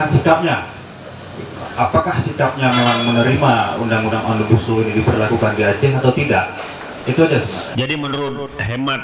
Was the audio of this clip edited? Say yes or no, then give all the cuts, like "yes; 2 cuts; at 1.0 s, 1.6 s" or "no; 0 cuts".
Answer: yes; 1 cut; at 7.6 s